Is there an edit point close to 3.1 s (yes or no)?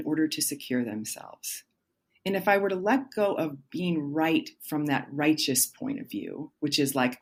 no